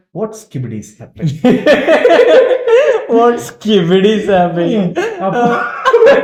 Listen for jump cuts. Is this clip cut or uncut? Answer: uncut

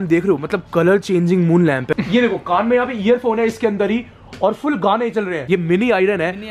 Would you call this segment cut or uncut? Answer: cut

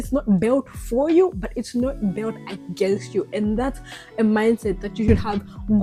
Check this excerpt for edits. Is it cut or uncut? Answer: uncut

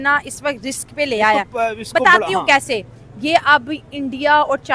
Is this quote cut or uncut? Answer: uncut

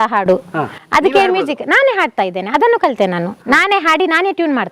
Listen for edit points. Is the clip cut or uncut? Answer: uncut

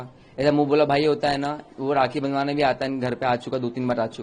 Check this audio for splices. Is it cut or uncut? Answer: uncut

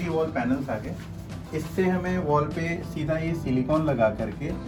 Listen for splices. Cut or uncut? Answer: uncut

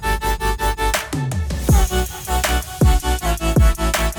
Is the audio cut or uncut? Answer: uncut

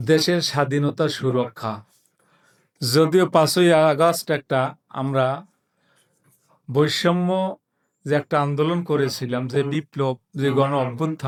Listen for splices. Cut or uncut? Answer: uncut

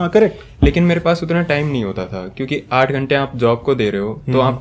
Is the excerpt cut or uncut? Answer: uncut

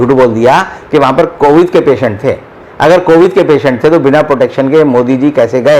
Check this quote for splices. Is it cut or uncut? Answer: uncut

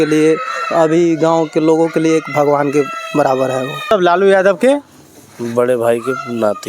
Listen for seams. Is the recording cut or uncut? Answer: cut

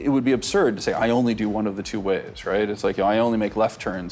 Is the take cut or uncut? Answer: uncut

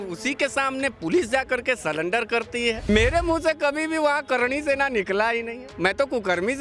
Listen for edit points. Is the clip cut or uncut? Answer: cut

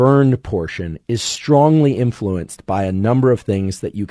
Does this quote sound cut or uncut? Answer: uncut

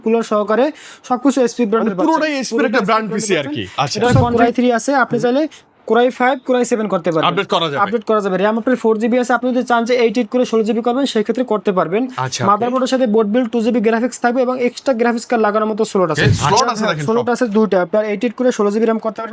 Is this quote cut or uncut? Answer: cut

